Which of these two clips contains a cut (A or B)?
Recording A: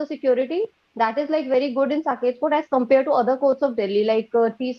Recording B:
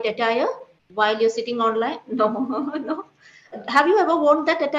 B